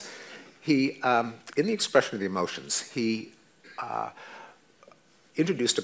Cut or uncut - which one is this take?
cut